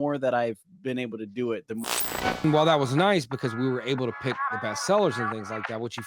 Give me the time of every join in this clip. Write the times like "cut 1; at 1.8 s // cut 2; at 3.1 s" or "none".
cut 1; at 2.1 s